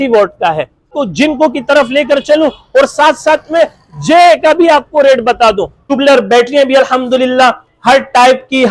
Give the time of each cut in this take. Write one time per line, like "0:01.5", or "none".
0:01.0
0:05.8

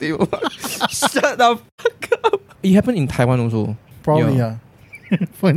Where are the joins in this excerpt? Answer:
0:02.6

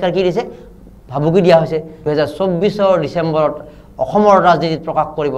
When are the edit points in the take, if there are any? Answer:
0:01.9

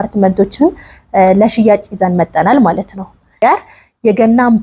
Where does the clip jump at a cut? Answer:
0:03.3

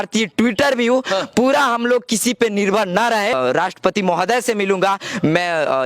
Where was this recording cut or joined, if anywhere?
0:03.3

